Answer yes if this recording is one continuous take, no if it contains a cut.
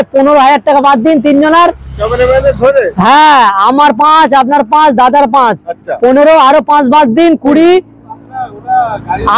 yes